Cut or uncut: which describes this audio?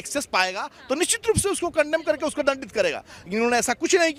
uncut